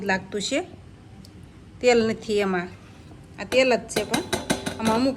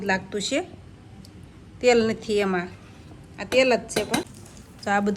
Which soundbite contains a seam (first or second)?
second